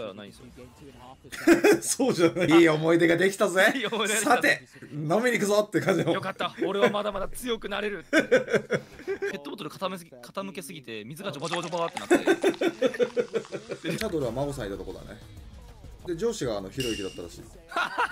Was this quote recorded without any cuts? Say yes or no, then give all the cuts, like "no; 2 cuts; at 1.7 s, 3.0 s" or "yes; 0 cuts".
no; 4 cuts; at 2.5 s, 9.3 s, 14.0 s, 15.9 s